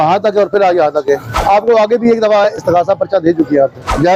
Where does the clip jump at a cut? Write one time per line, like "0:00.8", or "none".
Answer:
none